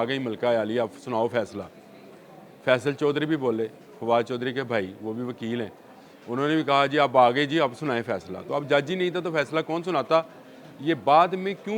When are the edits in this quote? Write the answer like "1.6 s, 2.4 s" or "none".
none